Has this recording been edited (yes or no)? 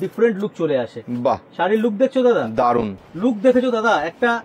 yes